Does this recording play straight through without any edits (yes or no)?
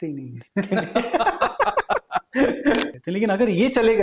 no